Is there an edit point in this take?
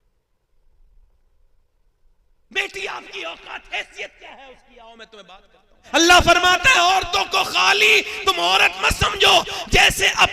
yes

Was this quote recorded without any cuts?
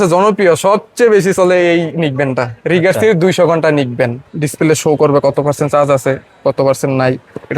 no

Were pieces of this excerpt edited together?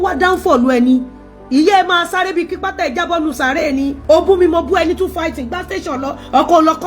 yes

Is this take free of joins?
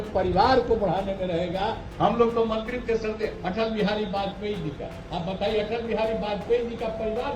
no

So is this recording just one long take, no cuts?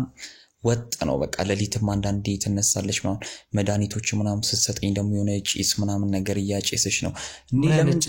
yes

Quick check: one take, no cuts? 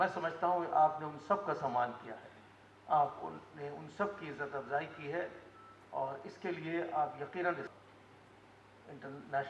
no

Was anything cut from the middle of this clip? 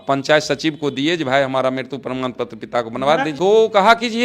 yes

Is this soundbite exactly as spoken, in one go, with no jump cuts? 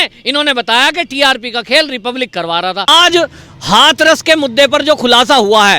no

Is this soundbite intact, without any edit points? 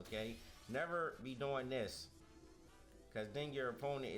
no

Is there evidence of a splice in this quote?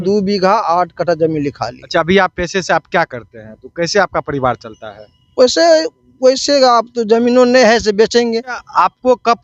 yes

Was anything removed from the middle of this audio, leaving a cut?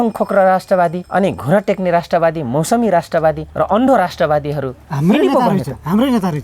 yes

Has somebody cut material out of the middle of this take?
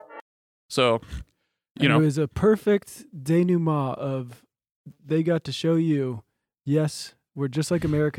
yes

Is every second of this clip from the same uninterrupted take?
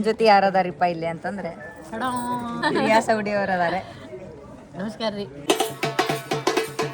no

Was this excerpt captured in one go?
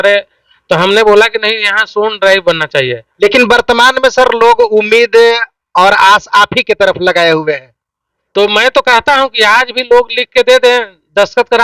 no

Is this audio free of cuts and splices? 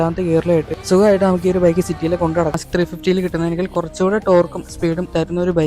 no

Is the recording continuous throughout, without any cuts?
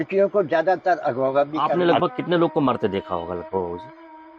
no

